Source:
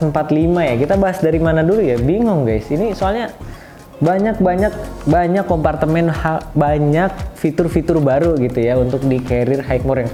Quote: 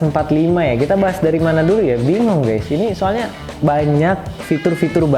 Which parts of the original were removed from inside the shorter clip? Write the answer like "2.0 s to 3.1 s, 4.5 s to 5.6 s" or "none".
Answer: 3.5 s to 6.4 s